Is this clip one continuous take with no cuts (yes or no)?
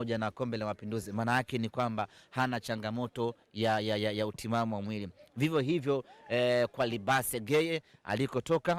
yes